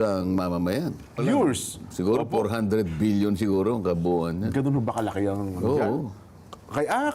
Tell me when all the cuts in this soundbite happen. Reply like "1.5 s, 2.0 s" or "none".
1.2 s